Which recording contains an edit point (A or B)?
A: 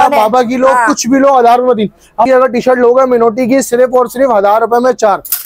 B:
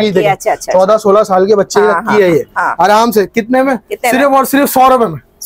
A